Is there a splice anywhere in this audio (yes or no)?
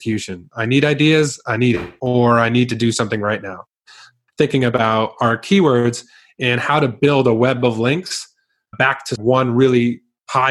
yes